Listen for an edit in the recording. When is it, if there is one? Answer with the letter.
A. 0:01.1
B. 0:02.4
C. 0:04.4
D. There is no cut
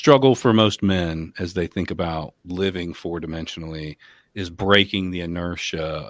B